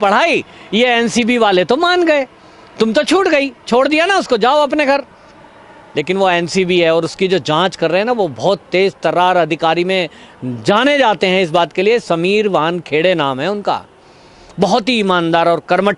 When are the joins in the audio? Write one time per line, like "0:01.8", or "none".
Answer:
none

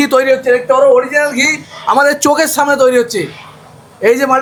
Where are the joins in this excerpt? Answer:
none

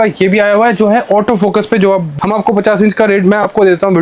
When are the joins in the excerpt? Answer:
0:02.1

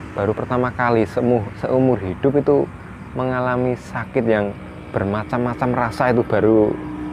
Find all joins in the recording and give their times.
none

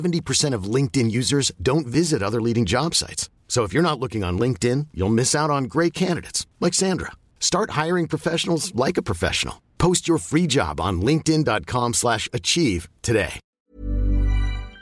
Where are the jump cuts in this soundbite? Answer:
0:13.6

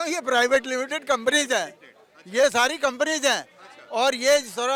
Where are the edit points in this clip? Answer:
none

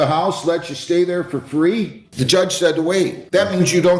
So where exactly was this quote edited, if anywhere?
0:02.0
0:03.2

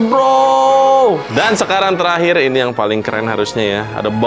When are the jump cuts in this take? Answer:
0:01.3

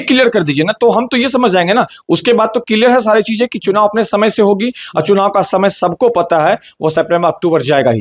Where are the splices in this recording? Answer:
none

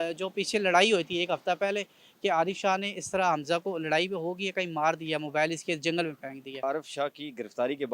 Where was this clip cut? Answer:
0:06.6

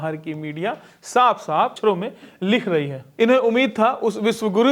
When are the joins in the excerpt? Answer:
0:01.8
0:03.1

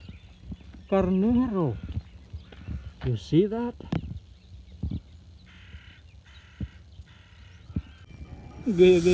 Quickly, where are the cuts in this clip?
0:08.0

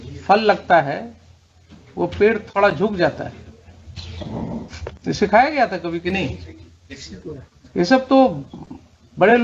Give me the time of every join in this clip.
0:05.0

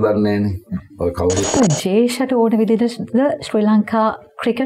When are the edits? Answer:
0:01.6

